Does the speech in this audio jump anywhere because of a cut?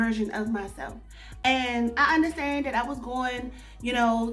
no; 0 cuts

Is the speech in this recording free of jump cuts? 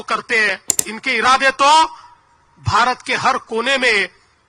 no; 1 cut; at 0.9 s

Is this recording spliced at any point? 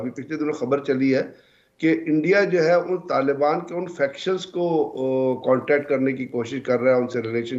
no; 0 cuts

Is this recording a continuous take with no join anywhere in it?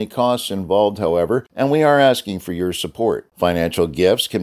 no; 1 cut; at 1.5 s

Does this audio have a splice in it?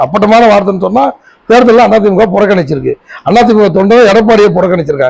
no; 0 cuts

